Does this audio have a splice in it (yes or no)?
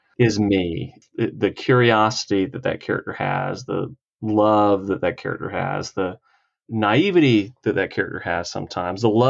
yes